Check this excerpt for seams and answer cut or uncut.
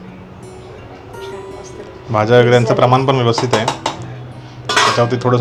uncut